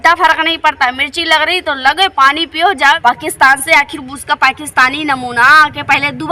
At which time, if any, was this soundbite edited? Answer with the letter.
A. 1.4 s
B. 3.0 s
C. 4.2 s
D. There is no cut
B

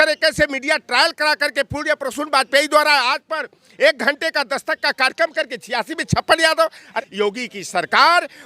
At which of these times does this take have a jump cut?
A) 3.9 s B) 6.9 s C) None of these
B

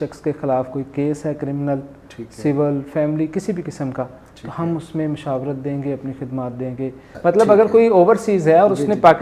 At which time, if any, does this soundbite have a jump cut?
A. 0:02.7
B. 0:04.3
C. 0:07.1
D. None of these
C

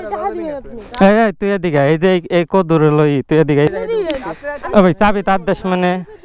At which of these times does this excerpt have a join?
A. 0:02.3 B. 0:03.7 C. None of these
B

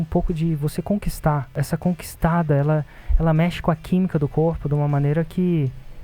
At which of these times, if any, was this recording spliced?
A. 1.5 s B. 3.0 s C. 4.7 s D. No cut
A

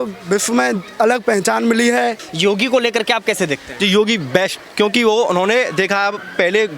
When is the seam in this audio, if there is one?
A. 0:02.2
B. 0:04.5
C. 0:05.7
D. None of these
A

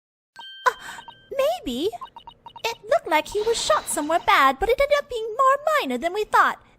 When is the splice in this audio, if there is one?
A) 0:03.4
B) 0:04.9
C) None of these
B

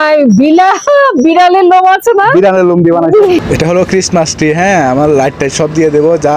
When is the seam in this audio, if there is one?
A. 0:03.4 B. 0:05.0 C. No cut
A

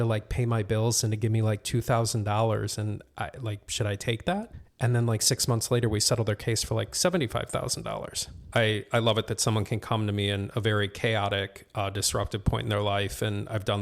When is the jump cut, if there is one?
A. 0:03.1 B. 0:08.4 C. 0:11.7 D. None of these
B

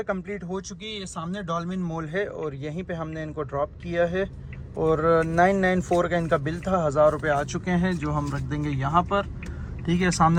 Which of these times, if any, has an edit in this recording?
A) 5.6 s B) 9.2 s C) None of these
C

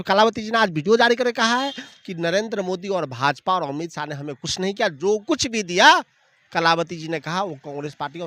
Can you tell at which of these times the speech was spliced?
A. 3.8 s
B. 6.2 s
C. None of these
C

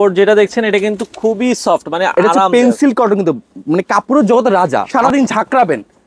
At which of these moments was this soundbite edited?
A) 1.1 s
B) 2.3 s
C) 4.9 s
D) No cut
C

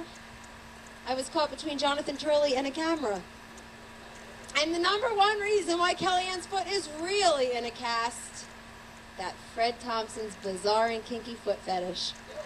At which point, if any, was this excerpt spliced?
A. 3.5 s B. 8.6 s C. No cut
B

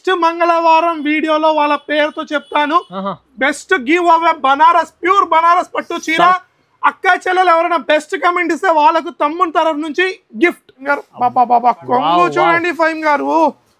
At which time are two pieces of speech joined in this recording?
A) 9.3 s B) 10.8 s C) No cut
B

